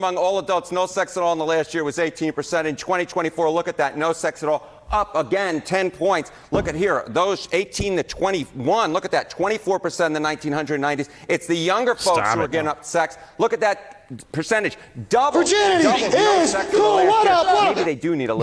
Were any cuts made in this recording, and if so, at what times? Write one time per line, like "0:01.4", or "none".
none